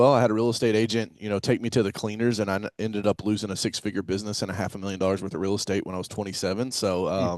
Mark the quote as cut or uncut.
uncut